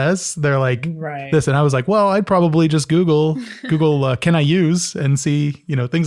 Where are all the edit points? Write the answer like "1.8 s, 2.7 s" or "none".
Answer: none